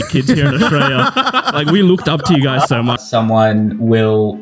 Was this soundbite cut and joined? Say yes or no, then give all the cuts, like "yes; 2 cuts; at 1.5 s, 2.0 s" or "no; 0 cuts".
yes; 1 cut; at 3.0 s